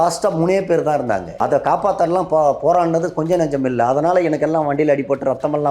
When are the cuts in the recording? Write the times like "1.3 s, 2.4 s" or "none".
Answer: 1.3 s